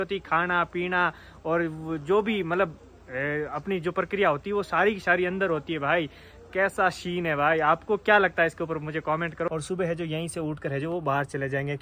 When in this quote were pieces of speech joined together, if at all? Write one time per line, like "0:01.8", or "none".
0:09.5